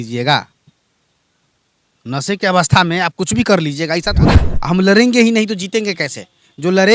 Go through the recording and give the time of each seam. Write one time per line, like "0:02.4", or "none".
0:04.2